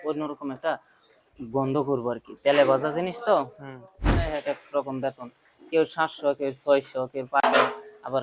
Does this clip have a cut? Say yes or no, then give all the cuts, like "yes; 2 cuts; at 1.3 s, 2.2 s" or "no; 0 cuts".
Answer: yes; 2 cuts; at 4.0 s, 7.4 s